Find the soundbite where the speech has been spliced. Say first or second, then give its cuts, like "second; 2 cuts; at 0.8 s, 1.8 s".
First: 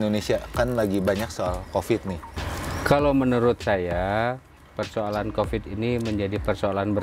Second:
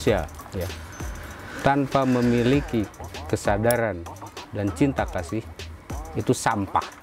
first; 1 cut; at 2.4 s